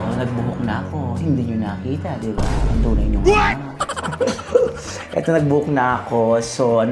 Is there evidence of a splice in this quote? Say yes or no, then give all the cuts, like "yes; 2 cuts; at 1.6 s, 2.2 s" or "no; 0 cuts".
no; 0 cuts